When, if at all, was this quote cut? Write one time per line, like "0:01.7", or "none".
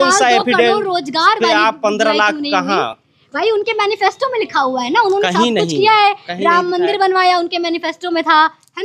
none